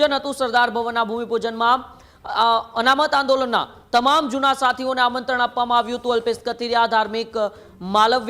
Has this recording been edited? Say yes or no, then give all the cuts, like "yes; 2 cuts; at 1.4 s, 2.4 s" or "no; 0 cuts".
no; 0 cuts